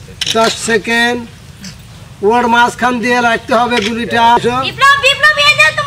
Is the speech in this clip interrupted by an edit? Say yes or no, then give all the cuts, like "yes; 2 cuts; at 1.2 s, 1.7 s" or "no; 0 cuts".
yes; 1 cut; at 4.4 s